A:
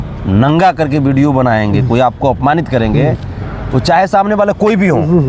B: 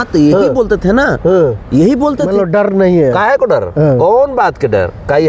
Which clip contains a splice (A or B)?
B